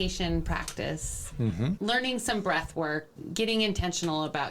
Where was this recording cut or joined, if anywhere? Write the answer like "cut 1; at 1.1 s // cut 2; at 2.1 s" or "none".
cut 1; at 1.8 s // cut 2; at 3.2 s